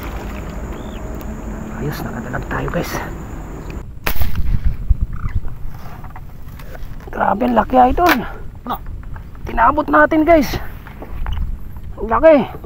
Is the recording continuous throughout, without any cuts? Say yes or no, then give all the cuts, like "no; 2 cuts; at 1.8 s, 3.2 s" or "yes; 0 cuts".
no; 1 cut; at 3.8 s